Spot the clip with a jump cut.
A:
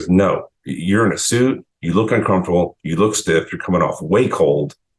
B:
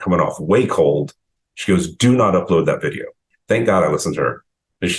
B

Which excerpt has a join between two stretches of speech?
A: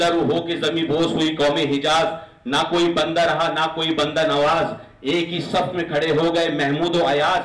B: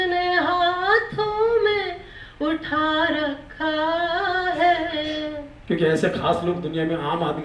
B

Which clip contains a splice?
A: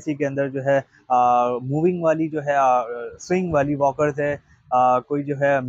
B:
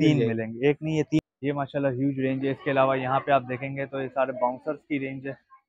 B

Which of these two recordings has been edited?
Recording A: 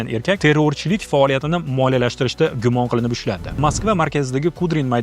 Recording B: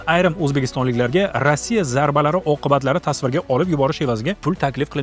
A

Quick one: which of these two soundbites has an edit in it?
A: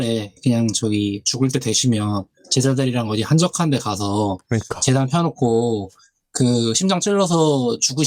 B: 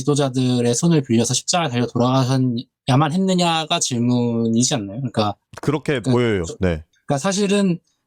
B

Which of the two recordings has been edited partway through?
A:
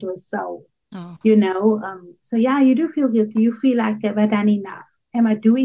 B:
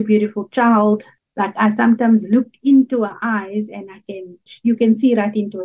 B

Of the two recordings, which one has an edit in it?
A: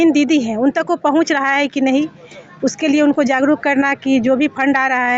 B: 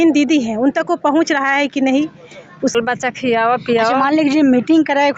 B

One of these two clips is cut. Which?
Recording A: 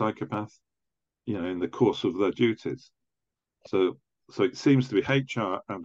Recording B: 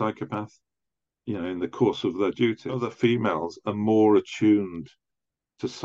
B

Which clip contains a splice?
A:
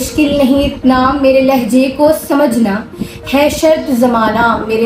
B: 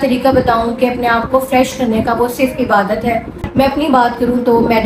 B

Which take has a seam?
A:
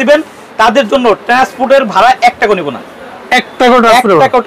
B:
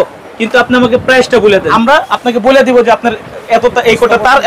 B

